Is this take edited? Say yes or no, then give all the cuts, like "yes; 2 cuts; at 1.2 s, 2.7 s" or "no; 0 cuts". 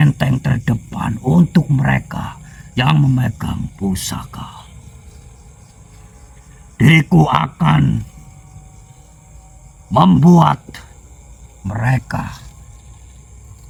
no; 0 cuts